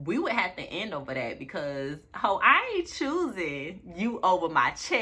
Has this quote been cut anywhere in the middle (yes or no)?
no